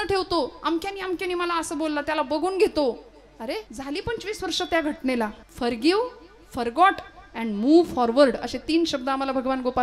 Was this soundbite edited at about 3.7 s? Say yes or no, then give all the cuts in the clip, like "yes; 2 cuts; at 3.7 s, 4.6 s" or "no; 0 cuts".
yes; 2 cuts; at 3.7 s, 5.4 s